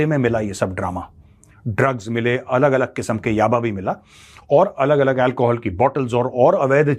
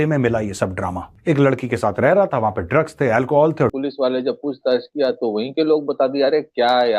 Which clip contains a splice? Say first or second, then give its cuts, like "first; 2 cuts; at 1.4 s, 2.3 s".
second; 2 cuts; at 1.1 s, 3.7 s